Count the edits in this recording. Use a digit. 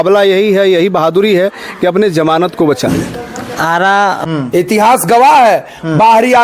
1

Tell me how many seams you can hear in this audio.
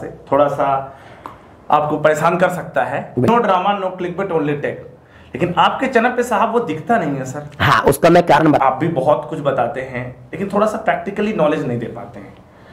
2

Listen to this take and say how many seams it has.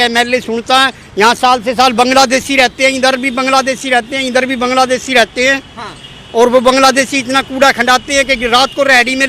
0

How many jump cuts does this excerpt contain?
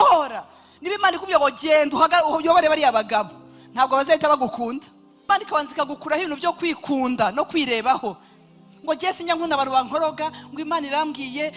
1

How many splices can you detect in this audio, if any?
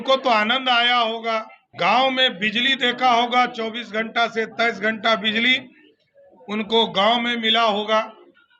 1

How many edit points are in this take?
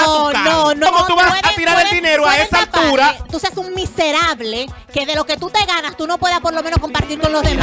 2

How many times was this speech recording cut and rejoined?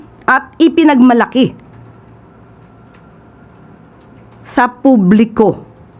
0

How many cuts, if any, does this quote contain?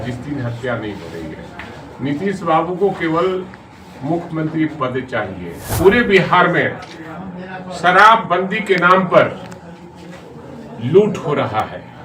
1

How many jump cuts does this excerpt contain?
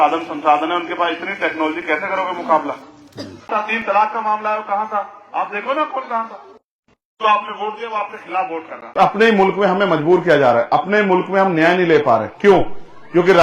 2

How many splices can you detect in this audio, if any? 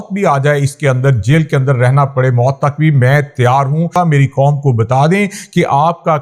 1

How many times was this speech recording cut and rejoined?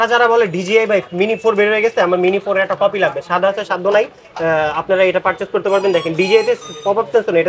0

